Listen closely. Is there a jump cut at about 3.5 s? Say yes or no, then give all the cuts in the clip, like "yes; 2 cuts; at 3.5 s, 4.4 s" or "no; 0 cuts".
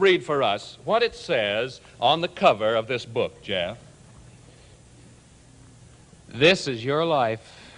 no; 0 cuts